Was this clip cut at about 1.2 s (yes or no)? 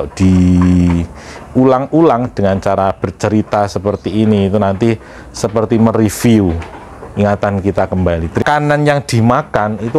no